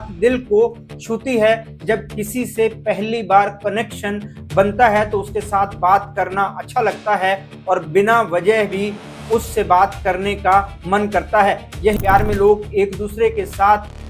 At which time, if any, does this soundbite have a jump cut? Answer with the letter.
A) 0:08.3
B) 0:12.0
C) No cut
B